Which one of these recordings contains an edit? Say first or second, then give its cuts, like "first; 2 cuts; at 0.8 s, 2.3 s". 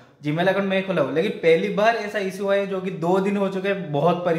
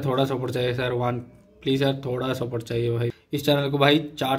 second; 1 cut; at 3.2 s